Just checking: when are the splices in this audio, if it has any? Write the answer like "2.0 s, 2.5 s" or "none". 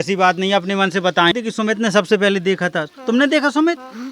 1.3 s

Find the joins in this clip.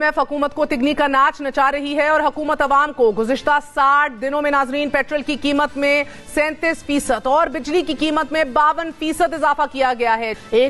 none

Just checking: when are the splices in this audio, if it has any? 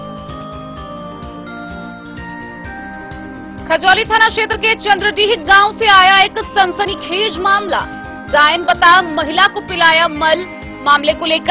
1.0 s

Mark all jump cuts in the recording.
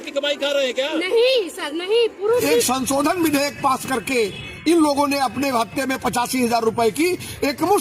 2.7 s

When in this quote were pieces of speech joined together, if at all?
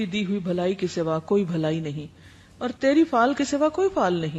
none

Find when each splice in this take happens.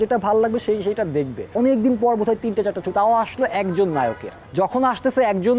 1.5 s, 4.4 s

